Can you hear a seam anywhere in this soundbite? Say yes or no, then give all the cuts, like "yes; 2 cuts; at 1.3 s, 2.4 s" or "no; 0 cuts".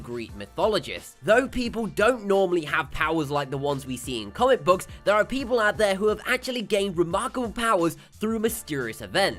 no; 0 cuts